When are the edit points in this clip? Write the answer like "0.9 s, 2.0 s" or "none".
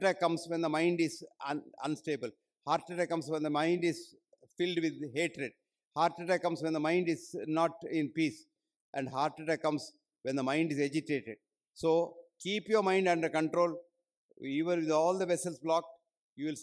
none